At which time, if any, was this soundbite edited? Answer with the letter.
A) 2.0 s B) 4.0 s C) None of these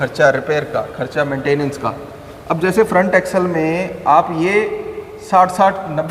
C